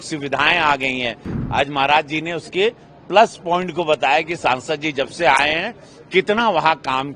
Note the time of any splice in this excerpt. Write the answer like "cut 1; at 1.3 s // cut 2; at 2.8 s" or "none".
cut 1; at 1.3 s

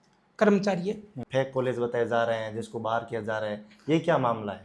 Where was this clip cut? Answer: cut 1; at 1.2 s

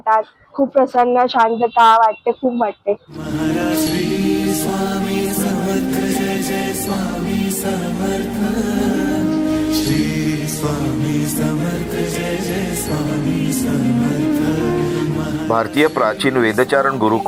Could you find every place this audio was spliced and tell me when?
none

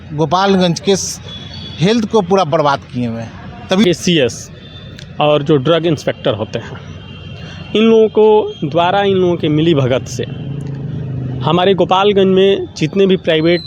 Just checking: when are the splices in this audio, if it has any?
cut 1; at 3.8 s

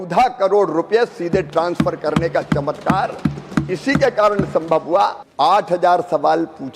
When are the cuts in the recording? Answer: cut 1; at 5.2 s

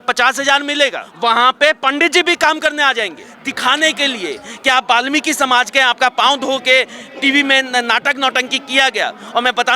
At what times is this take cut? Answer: cut 1; at 1.0 s // cut 2; at 3.3 s

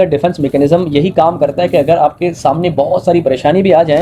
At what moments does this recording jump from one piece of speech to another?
none

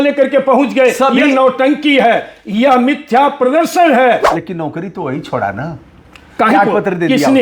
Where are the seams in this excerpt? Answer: cut 1; at 4.4 s

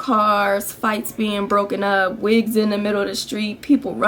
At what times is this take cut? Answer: none

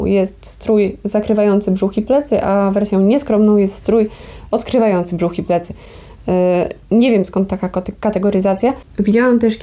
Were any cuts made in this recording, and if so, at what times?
none

